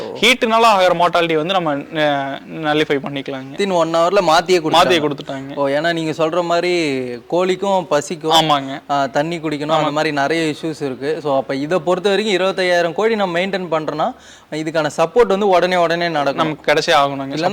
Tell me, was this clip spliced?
yes; 1 cut; at 3.5 s

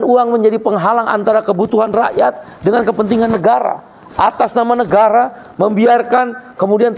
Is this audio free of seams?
yes; 0 cuts

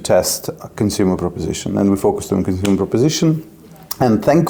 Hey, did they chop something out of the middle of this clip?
no; 0 cuts

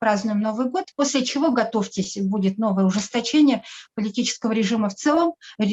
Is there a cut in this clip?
no; 0 cuts

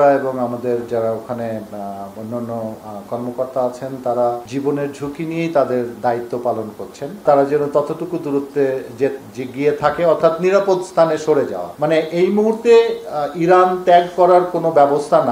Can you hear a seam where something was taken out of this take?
yes; 2 cuts; at 7.2 s, 11.6 s

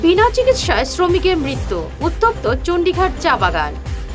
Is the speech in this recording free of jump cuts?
yes; 0 cuts

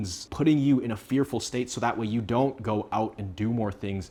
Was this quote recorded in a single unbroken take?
yes; 0 cuts

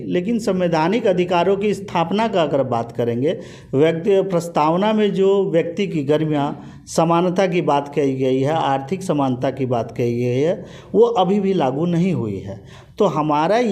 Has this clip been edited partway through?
no; 0 cuts

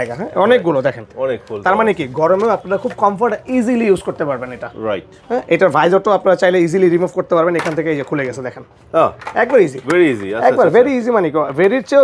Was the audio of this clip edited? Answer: no; 0 cuts

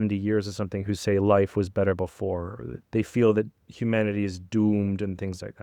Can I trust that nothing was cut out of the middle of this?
no; 1 cut; at 2.8 s

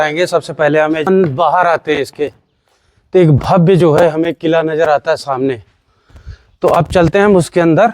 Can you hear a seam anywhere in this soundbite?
yes; 1 cut; at 1.1 s

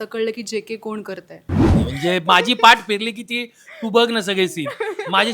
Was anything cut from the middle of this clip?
yes; 1 cut; at 1.8 s

